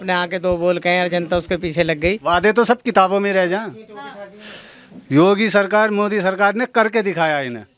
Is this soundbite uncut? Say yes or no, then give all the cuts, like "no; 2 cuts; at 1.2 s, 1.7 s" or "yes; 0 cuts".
no; 1 cut; at 2.2 s